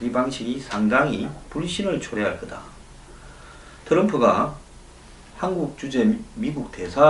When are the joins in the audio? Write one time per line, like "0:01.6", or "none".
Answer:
0:01.7